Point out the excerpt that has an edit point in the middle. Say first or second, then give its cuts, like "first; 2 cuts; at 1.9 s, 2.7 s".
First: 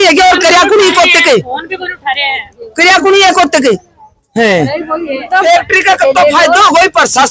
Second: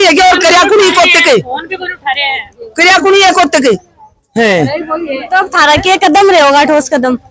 first; 1 cut; at 5.4 s